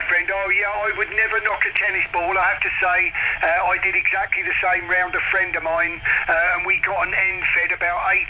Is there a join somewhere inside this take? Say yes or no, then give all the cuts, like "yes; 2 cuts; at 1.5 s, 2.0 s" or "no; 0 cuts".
no; 0 cuts